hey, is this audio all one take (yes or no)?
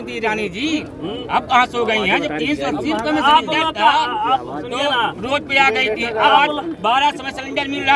yes